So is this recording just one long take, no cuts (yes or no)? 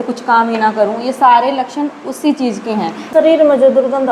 no